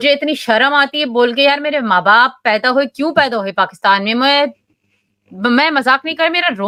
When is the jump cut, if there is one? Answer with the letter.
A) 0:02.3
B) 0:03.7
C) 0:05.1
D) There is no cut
D